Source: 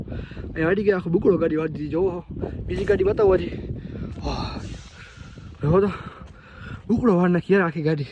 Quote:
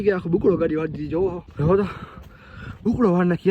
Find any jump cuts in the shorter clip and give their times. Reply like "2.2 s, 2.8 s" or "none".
1.4 s